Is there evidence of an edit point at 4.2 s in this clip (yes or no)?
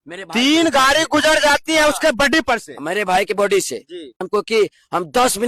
yes